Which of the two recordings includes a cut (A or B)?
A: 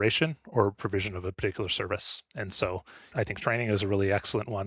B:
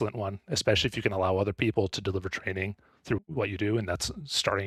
A